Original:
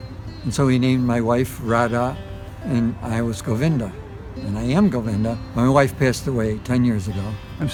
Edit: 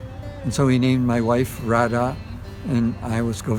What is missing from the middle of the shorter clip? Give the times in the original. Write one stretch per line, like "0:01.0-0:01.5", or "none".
none